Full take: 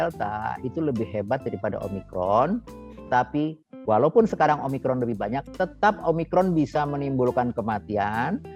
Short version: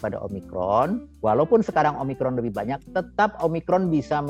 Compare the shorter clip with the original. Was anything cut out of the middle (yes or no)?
yes